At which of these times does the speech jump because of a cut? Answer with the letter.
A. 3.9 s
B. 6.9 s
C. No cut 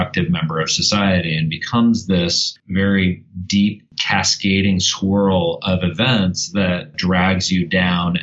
B